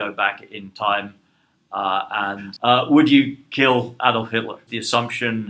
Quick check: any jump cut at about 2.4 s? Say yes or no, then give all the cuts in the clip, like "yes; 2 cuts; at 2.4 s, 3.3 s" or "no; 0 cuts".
yes; 2 cuts; at 2.4 s, 4.7 s